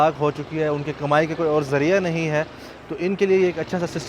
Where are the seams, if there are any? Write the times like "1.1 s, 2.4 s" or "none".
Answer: none